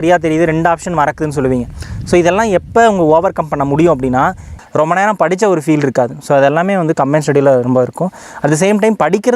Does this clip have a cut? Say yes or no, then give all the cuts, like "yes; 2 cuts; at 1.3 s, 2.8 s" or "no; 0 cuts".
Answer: yes; 1 cut; at 4.6 s